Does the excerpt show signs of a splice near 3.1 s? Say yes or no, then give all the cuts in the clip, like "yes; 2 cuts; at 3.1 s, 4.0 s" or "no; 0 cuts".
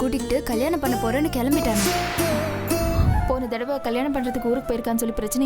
yes; 1 cut; at 3.1 s